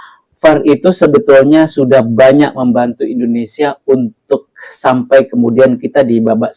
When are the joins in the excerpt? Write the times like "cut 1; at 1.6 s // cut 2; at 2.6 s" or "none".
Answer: none